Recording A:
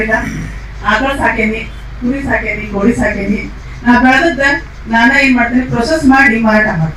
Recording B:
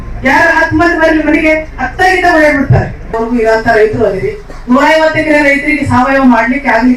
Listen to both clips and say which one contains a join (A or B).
B